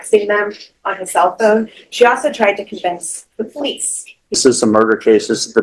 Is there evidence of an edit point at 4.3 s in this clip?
yes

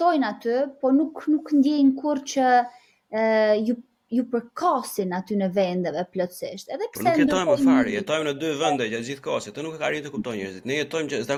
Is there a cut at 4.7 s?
no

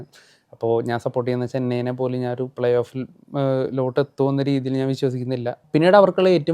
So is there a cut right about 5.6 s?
yes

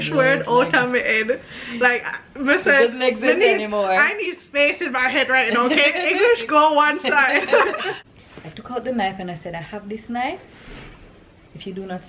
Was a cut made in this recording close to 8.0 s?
yes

